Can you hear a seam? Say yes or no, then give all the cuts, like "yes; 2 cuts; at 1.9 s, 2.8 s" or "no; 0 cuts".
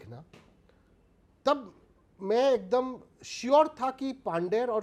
no; 0 cuts